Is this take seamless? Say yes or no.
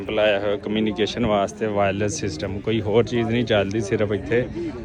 yes